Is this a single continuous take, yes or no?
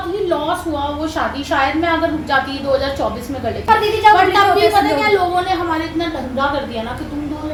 yes